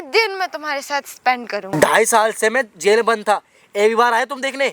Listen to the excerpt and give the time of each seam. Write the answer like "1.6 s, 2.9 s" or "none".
1.7 s